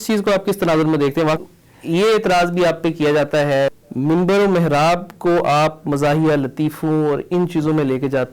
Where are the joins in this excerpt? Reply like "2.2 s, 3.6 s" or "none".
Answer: 1.4 s, 3.7 s